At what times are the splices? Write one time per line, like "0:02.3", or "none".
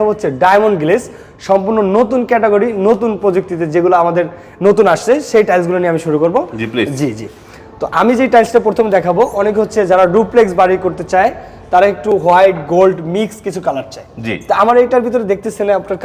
none